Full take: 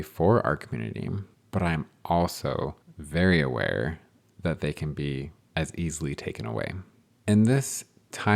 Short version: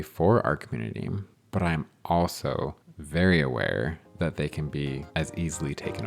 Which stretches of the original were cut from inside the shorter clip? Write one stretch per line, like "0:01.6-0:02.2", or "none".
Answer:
0:04.0-0:04.3
0:05.3-0:05.5